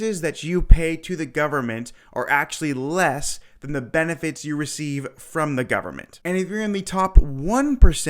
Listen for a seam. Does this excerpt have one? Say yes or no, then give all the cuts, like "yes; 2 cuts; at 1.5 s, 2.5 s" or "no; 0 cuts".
yes; 1 cut; at 6.1 s